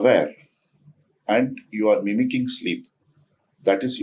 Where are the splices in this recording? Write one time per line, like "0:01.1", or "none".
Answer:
none